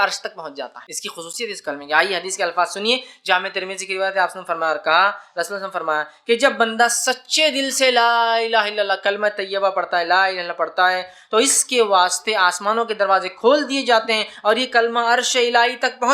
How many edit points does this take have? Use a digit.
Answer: 1